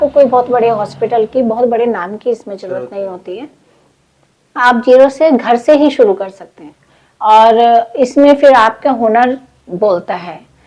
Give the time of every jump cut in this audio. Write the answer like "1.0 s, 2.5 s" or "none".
none